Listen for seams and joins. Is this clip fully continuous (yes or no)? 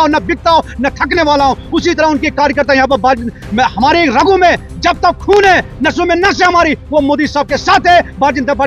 yes